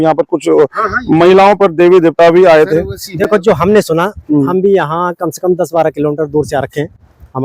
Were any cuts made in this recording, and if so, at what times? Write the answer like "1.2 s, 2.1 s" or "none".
none